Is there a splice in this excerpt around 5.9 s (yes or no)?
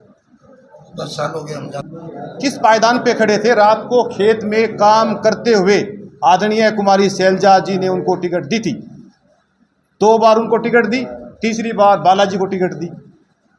no